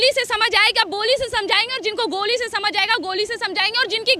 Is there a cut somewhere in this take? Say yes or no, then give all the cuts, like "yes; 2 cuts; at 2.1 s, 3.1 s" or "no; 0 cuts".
no; 0 cuts